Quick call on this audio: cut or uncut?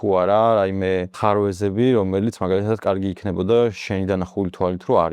cut